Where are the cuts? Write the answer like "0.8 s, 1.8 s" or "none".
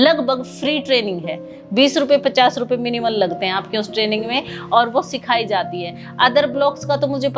none